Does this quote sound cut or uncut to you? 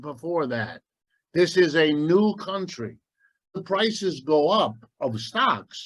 cut